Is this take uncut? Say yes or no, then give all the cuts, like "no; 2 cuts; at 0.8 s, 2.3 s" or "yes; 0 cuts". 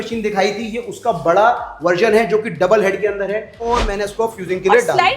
no; 1 cut; at 3.6 s